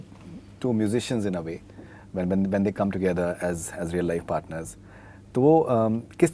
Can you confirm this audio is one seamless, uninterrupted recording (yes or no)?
yes